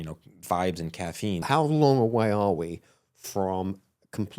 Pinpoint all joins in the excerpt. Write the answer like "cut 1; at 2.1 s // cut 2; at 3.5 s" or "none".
cut 1; at 1.4 s